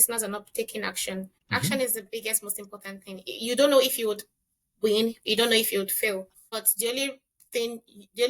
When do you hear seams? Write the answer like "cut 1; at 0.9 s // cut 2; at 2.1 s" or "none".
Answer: cut 1; at 1.4 s // cut 2; at 6.4 s